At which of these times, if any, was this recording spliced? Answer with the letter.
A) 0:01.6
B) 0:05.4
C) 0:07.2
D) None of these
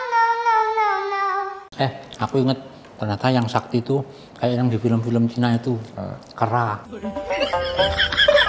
A